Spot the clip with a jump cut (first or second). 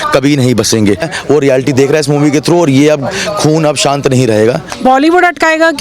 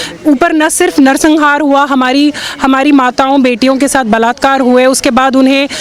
first